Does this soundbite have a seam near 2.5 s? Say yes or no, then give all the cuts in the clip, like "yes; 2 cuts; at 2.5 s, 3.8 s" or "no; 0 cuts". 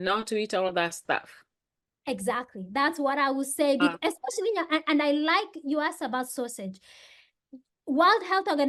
no; 0 cuts